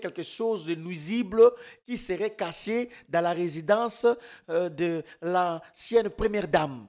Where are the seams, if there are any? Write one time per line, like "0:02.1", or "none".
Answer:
none